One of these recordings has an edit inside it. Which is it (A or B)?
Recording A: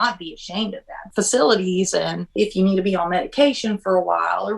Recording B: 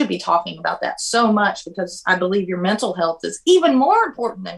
A